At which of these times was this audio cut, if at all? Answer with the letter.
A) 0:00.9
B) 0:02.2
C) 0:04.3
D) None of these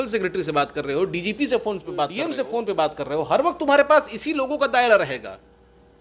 B